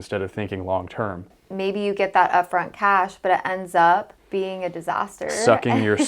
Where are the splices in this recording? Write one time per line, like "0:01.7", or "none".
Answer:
0:01.4
0:04.2